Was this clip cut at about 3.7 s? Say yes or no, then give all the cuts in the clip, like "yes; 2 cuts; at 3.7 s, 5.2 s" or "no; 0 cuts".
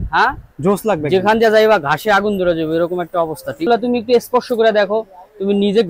yes; 1 cut; at 3.7 s